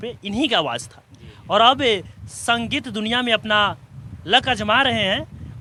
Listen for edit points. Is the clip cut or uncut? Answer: uncut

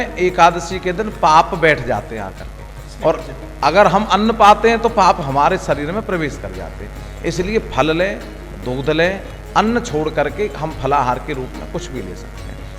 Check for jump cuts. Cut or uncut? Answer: uncut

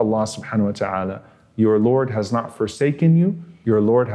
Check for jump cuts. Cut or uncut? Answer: uncut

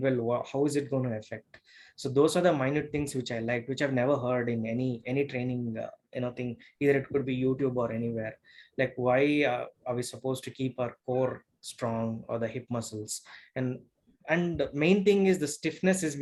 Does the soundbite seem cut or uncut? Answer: uncut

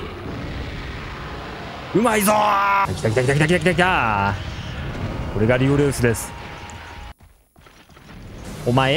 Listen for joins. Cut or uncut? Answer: cut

